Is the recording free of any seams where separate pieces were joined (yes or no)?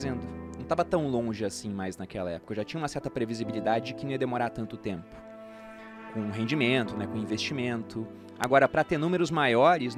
yes